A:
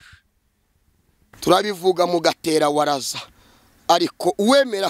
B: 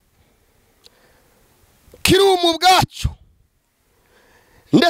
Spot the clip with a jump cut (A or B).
A